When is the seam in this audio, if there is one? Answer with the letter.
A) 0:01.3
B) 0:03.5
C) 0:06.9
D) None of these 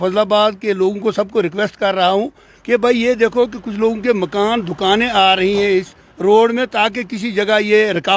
D